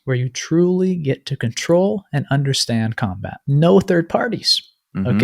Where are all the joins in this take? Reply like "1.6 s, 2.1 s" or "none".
3.3 s